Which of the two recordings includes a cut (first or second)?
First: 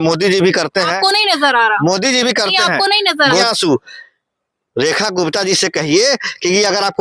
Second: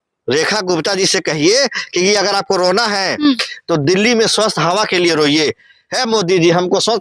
first